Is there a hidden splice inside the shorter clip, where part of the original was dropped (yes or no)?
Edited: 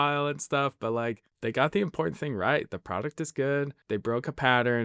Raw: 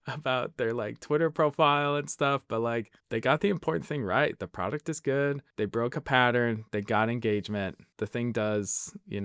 no